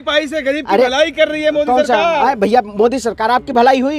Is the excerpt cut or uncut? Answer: uncut